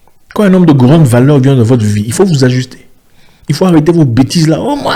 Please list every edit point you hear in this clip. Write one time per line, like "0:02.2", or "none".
none